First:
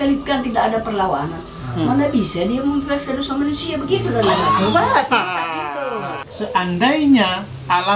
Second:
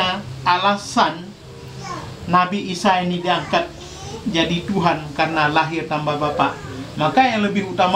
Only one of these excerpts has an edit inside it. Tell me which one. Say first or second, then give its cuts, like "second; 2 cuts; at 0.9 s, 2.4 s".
first; 1 cut; at 6.2 s